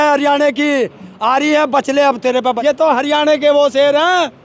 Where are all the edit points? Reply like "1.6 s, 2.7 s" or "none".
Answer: 2.6 s